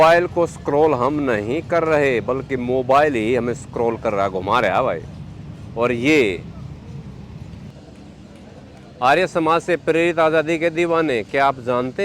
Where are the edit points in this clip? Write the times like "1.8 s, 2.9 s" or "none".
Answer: 7.7 s